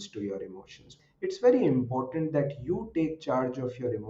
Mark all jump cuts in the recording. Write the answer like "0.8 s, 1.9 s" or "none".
0.9 s

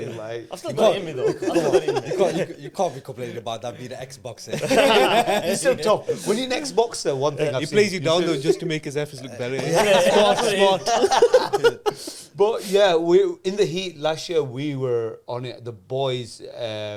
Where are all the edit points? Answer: none

